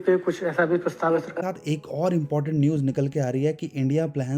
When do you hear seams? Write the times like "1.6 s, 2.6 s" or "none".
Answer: 1.3 s